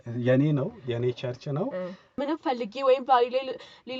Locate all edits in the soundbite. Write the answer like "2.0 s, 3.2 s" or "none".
2.2 s